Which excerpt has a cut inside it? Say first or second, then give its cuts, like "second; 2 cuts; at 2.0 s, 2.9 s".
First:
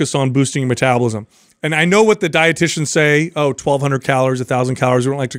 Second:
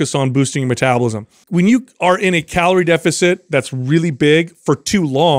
second; 1 cut; at 1.4 s